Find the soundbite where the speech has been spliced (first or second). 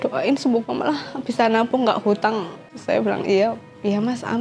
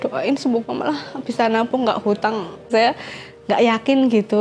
second